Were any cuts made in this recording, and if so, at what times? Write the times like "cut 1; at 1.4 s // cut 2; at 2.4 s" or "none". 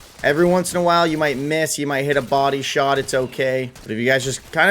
cut 1; at 3.8 s